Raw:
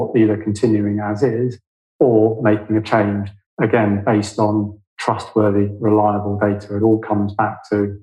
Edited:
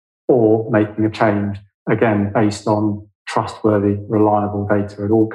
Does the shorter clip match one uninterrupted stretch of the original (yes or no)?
yes